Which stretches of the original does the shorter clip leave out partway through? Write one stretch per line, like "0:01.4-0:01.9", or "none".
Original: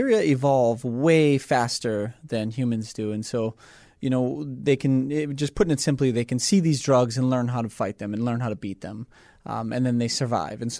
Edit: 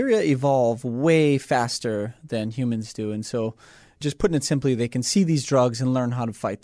0:04.0-0:05.3